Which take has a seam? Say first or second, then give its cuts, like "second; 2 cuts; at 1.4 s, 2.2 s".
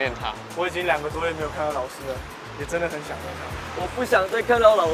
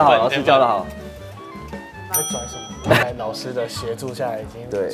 second; 1 cut; at 3.0 s